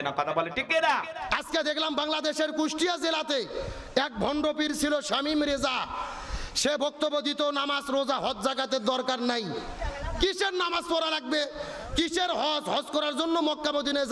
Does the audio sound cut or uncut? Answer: cut